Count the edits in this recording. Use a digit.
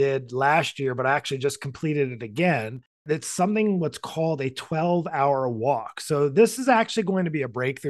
1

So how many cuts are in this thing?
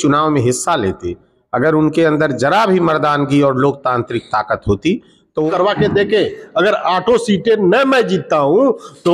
1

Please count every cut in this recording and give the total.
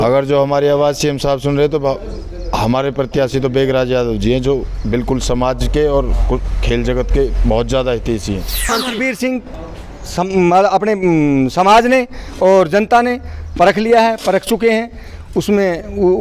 1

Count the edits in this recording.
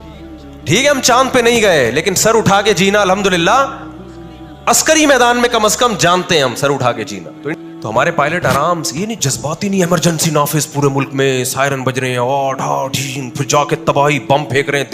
1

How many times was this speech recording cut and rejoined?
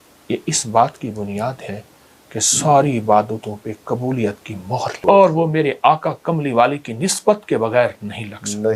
0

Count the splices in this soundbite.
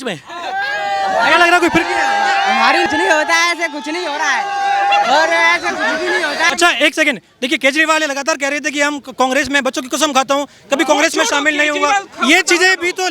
2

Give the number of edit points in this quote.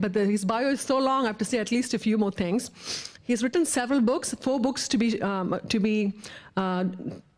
1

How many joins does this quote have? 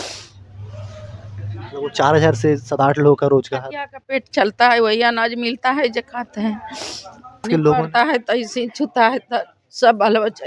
1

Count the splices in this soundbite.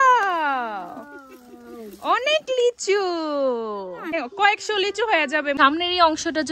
2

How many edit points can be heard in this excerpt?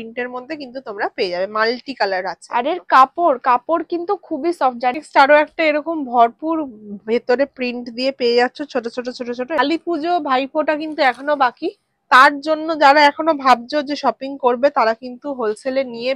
2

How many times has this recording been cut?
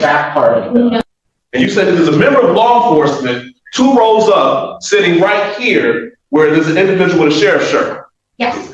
1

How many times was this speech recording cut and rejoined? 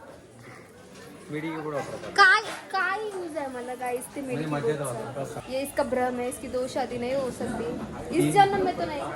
1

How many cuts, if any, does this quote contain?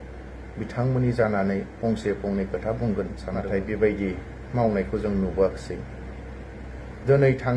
1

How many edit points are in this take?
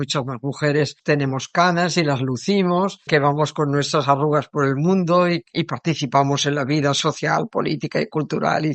2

